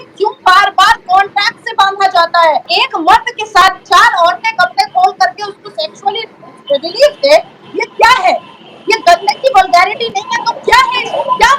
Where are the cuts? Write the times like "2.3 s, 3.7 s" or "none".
2.7 s